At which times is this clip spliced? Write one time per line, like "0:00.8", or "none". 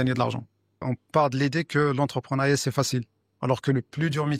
0:00.9